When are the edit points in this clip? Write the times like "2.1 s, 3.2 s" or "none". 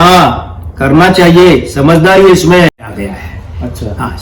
2.9 s